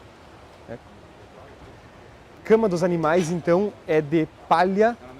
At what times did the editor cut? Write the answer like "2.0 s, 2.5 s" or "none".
2.4 s